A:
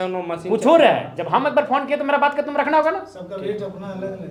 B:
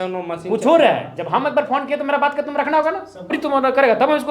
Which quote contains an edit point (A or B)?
B